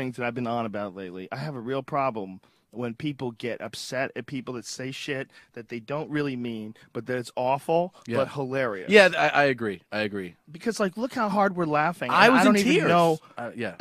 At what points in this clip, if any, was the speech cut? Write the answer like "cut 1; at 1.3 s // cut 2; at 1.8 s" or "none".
none